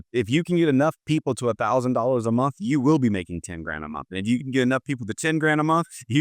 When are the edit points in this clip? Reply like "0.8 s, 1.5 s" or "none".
none